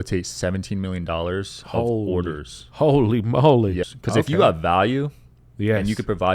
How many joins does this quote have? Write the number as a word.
one